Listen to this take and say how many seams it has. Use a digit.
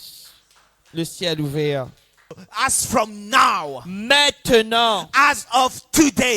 1